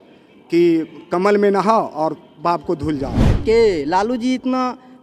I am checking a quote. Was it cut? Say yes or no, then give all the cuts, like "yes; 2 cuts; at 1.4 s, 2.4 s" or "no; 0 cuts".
yes; 1 cut; at 3.3 s